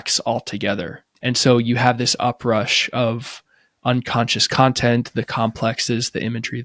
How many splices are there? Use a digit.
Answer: 1